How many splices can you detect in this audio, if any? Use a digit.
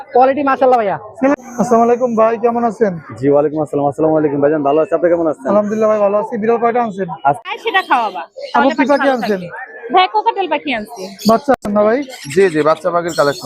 3